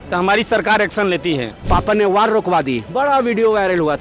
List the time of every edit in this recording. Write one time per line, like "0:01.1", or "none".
0:01.5

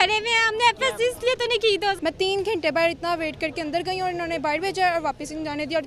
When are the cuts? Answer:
0:02.0

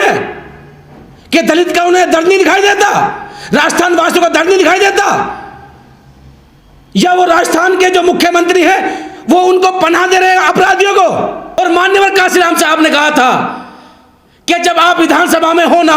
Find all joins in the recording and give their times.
0:11.6

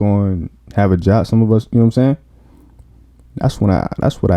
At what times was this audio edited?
none

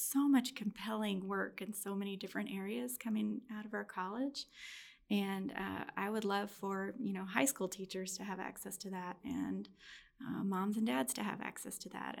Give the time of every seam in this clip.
none

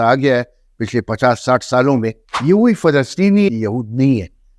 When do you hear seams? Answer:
0:02.3
0:03.5

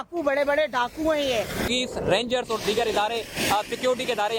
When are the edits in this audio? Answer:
0:01.6

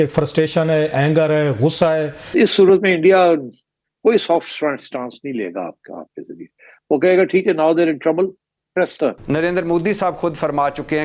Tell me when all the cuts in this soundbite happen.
none

